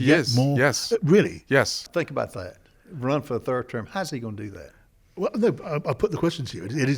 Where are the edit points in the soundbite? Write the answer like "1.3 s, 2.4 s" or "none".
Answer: 1.8 s